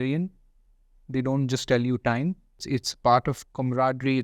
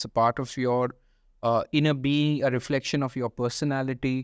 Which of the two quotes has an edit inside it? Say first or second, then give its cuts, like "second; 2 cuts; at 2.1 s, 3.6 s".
first; 1 cut; at 2.6 s